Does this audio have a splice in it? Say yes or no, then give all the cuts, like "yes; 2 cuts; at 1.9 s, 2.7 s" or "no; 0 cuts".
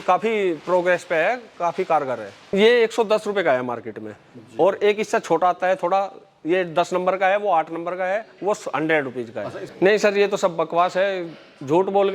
yes; 2 cuts; at 2.5 s, 9.7 s